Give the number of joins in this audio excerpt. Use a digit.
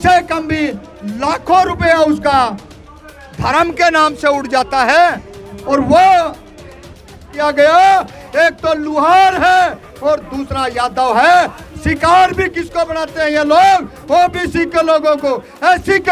1